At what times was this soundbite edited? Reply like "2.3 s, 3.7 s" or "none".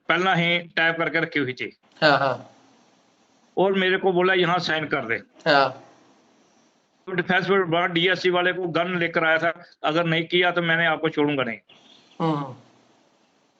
none